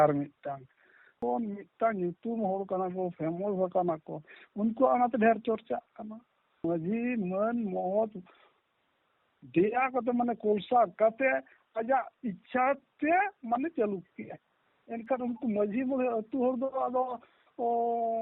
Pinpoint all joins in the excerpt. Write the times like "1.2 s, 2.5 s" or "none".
1.1 s, 6.6 s